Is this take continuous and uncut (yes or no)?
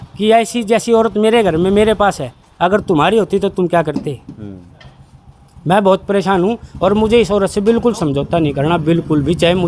yes